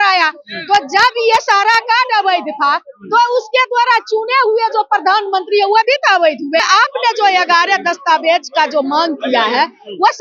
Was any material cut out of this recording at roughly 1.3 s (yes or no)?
no